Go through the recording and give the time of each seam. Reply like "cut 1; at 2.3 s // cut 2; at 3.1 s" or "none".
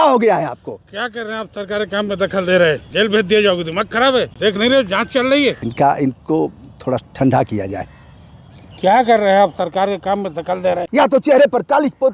cut 1; at 2.8 s // cut 2; at 4.3 s // cut 3; at 5.6 s // cut 4; at 10.8 s